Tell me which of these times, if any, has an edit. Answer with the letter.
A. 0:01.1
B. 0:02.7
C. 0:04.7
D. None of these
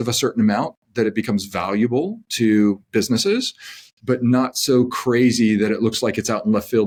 D